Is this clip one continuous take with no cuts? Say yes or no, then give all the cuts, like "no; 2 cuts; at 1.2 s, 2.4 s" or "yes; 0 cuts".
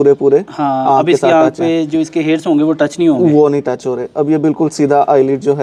yes; 0 cuts